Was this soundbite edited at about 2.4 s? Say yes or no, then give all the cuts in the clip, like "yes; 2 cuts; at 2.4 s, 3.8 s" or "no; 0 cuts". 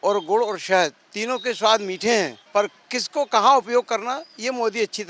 yes; 1 cut; at 2.4 s